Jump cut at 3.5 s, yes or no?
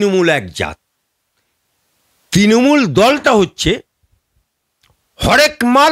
no